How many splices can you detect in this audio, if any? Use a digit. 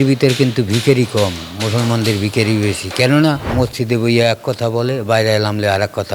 1